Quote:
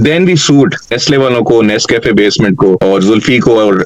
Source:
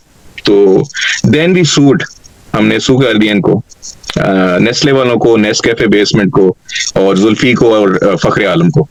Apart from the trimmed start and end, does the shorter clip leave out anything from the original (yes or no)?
yes